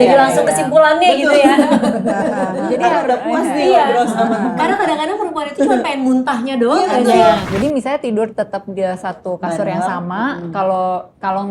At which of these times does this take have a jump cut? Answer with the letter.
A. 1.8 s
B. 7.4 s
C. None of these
B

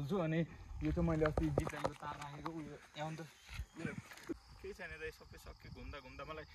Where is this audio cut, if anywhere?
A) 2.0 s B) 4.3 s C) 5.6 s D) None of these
B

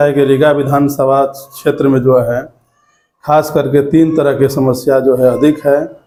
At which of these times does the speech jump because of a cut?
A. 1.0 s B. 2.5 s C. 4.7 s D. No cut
D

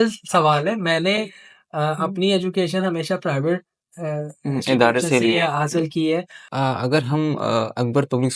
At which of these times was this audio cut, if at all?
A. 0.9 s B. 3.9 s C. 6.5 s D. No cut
C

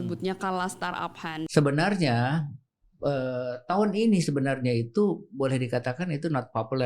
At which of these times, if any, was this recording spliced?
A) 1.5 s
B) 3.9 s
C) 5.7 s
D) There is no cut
A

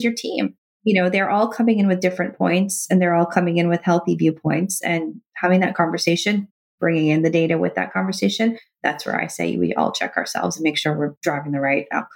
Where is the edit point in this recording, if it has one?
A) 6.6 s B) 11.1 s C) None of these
B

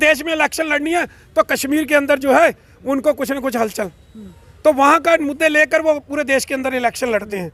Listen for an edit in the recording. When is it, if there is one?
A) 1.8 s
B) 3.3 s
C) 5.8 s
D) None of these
D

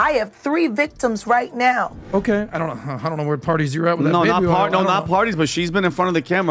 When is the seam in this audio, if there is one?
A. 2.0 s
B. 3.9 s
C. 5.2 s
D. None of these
A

